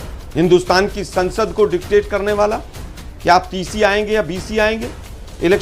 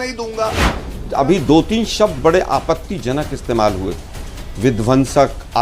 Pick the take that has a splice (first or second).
second